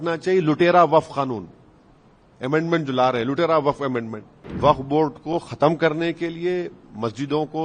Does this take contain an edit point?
yes; 1 cut; at 4.4 s

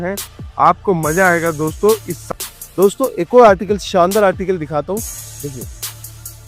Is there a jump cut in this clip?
yes; 1 cut; at 2.2 s

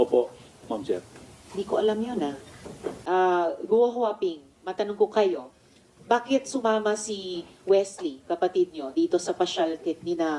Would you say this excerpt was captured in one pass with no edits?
no; 1 cut; at 3.0 s

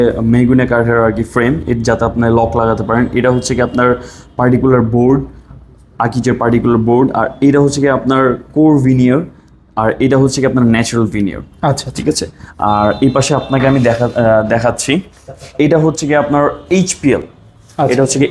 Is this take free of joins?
yes; 0 cuts

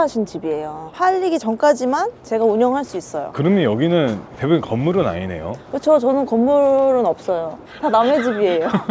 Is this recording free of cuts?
no; 1 cut; at 3.2 s

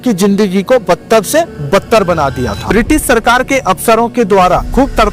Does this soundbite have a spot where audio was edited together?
yes; 1 cut; at 2.7 s

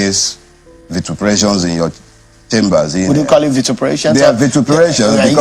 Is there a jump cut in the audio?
no; 0 cuts

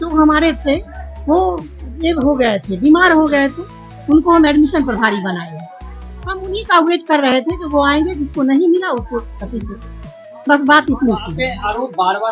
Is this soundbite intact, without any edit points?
yes; 0 cuts

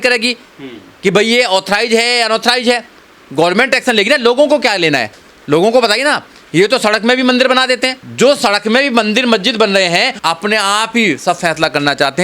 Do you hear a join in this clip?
yes; 1 cut; at 10.1 s

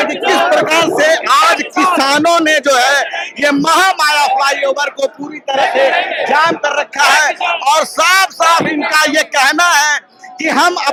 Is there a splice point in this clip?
no; 0 cuts

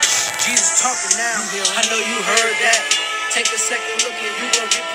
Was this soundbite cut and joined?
no; 0 cuts

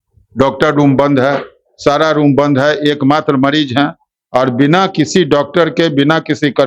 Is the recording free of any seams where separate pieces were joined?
yes; 0 cuts

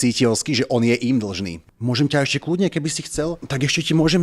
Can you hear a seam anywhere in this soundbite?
yes; 1 cut; at 1.6 s

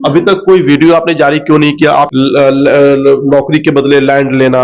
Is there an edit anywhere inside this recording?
yes; 1 cut; at 2.1 s

